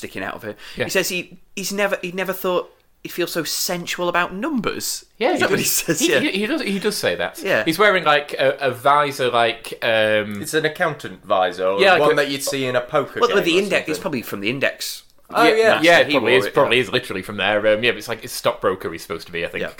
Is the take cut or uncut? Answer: uncut